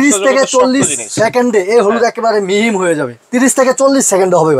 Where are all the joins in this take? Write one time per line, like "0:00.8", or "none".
0:03.2